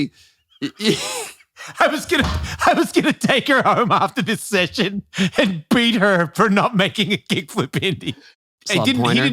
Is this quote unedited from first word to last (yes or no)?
no